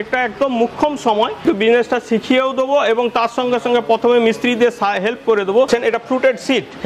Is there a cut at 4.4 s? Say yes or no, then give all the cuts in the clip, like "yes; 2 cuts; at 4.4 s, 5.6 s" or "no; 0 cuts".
no; 2 cuts; at 1.4 s, 5.7 s